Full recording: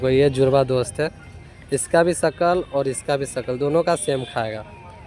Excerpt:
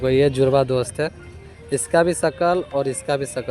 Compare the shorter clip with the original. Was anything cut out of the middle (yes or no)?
no